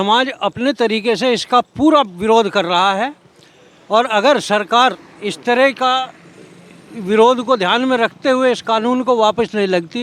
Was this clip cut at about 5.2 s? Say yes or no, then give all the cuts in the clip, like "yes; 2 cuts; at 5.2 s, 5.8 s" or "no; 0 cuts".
no; 0 cuts